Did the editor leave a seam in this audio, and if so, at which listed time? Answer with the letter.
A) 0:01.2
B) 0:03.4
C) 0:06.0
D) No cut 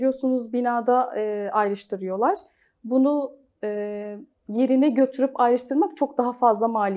D